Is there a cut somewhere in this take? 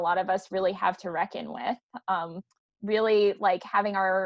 no; 0 cuts

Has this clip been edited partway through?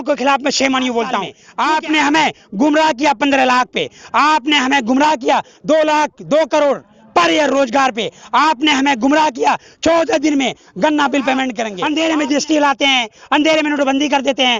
yes; 2 cuts; at 1.4 s, 11.7 s

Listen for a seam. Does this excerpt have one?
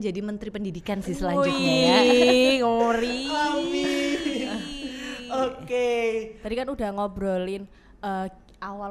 no; 0 cuts

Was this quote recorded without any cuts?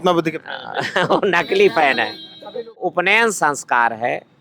no; 1 cut; at 2.8 s

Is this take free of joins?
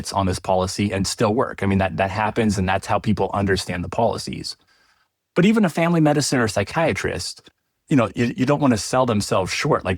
yes; 0 cuts

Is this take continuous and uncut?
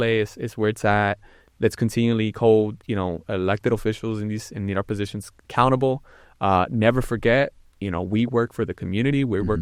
yes; 0 cuts

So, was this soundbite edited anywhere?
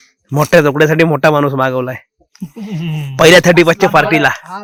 no; 0 cuts

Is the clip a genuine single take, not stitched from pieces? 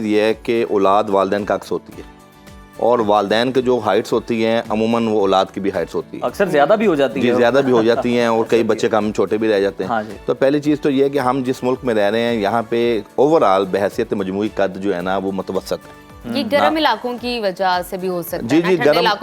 yes; 0 cuts

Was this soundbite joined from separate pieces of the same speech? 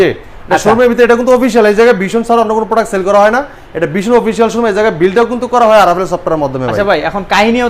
no; 0 cuts

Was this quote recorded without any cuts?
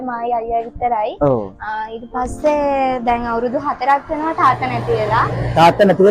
yes; 0 cuts

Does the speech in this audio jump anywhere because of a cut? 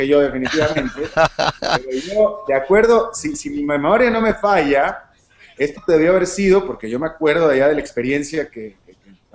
no; 0 cuts

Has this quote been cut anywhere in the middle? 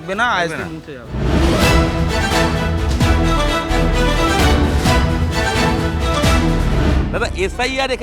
no; 0 cuts

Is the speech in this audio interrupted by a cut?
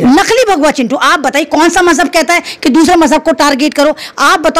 no; 0 cuts

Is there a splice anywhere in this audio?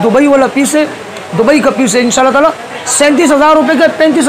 no; 0 cuts

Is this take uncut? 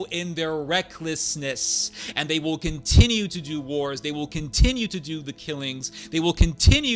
yes; 0 cuts

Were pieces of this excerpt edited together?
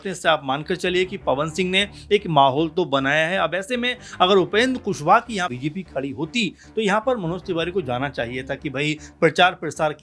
yes; 1 cut; at 5.5 s

